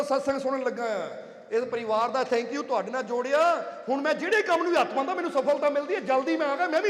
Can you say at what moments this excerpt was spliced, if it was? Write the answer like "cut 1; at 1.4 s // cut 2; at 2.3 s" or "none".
none

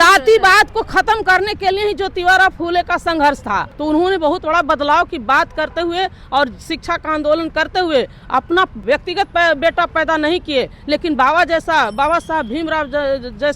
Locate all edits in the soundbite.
cut 1; at 3.7 s // cut 2; at 8.8 s

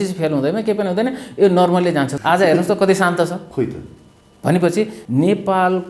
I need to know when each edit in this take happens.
cut 1; at 2.1 s // cut 2; at 3.4 s // cut 3; at 5.0 s

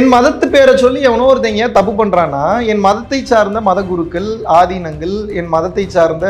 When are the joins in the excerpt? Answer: none

